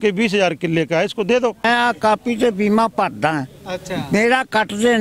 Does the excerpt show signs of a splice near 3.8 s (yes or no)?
no